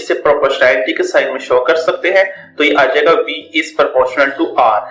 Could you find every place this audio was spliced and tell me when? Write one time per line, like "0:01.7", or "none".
none